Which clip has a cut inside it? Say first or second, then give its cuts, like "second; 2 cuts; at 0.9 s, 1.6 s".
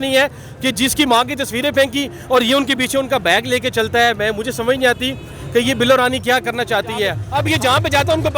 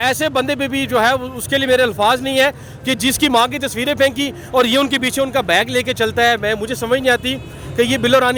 first; 1 cut; at 7.2 s